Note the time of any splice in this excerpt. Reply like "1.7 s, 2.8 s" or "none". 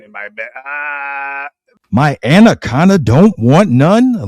1.8 s